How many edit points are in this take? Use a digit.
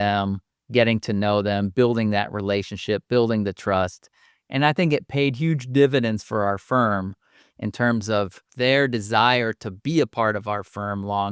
1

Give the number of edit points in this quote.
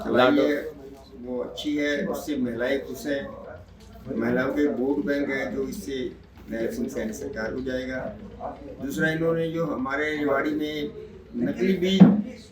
0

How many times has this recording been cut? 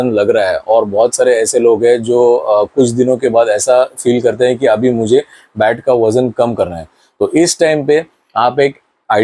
0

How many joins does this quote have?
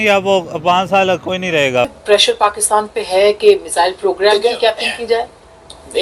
1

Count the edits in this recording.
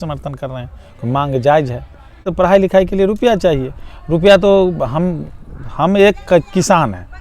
1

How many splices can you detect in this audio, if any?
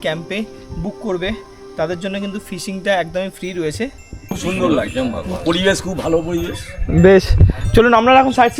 1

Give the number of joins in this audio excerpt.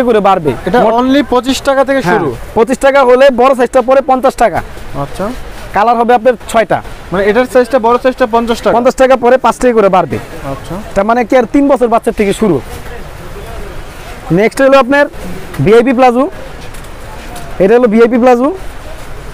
0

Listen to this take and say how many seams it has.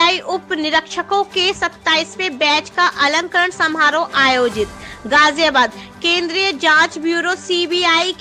0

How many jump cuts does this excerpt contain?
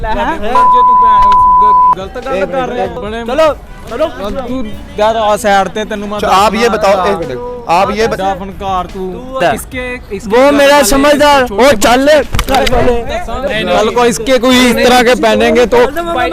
3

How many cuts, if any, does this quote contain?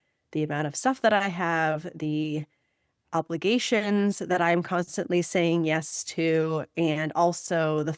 0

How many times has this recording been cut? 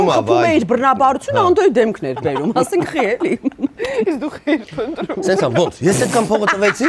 0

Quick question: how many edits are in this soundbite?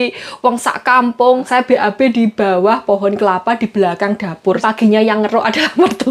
2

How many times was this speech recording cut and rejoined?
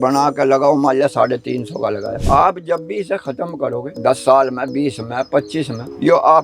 2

